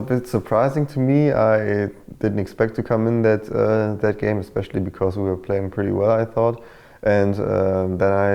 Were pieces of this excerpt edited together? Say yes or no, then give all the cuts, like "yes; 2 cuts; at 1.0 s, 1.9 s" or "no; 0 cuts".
no; 0 cuts